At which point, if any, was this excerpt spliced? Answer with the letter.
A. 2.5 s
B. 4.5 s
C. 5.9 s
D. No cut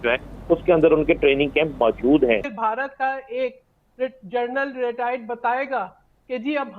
A